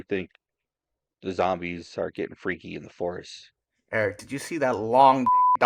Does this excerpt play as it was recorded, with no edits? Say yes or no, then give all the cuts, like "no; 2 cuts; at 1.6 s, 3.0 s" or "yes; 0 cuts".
yes; 0 cuts